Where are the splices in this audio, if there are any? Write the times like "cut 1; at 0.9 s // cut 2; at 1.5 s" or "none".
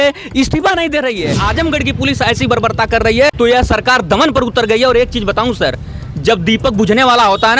cut 1; at 1.5 s // cut 2; at 3.3 s